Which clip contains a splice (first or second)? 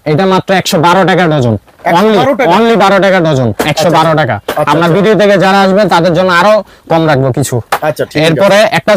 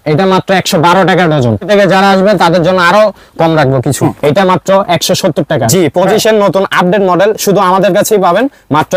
second